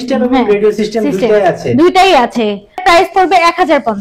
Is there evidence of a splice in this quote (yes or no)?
yes